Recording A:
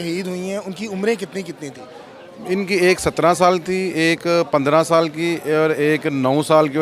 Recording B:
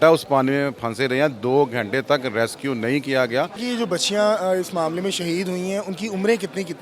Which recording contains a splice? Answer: B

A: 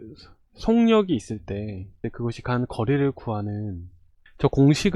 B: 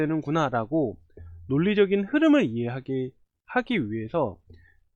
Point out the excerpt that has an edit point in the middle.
A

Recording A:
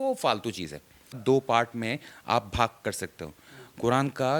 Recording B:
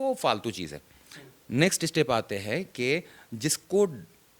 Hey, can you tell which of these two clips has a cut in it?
A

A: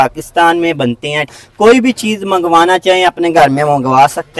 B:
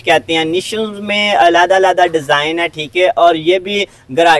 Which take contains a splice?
A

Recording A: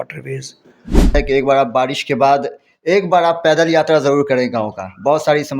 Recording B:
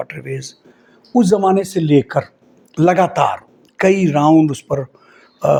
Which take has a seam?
A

